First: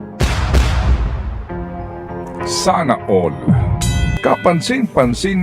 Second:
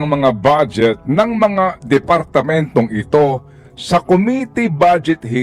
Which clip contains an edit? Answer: first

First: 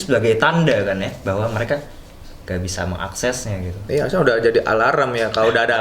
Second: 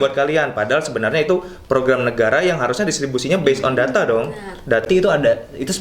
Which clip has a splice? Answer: second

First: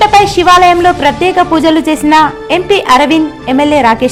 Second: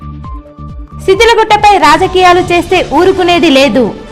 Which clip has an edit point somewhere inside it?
second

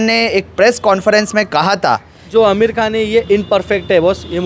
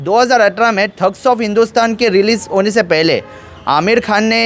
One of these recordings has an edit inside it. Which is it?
first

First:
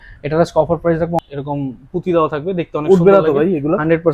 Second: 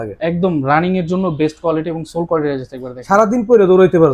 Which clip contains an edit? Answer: first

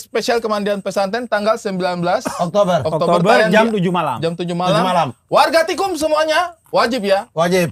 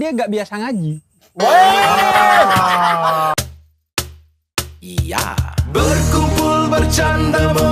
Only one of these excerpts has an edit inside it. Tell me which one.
second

